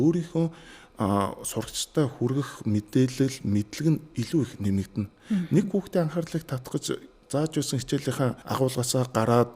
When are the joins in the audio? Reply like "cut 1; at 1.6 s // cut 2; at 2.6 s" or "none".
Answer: cut 1; at 8.4 s